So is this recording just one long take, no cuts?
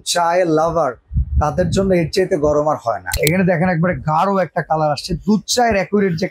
no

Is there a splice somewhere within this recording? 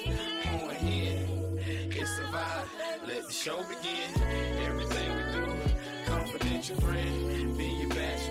no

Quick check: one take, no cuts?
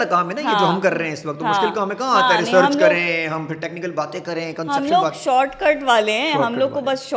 yes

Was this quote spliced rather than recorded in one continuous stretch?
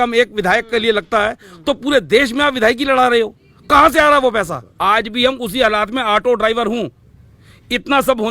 yes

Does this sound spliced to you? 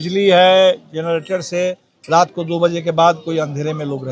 no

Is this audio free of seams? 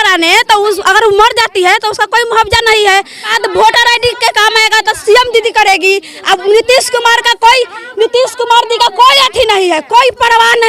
no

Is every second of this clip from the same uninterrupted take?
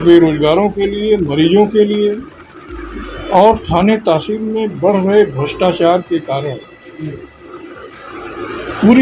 yes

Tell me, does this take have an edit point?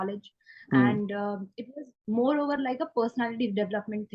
no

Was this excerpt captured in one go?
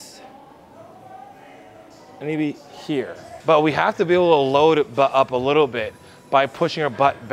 no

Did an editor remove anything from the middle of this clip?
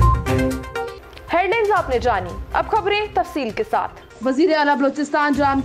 no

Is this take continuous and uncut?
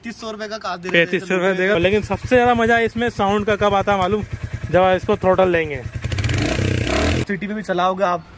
no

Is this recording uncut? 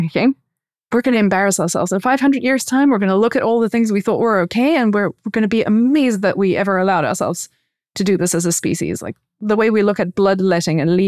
yes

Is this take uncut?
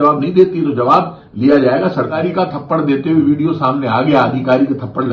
no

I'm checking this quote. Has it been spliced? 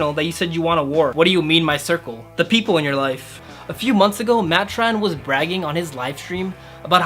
yes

